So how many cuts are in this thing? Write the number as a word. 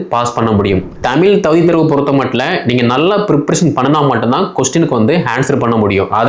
one